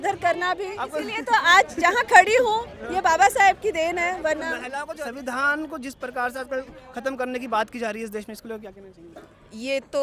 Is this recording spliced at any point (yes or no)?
yes